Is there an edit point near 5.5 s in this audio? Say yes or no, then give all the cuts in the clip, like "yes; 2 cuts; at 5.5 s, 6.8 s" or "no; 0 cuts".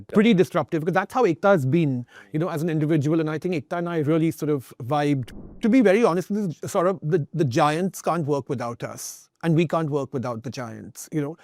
yes; 1 cut; at 5.5 s